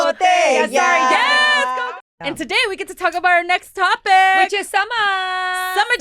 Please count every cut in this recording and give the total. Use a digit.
1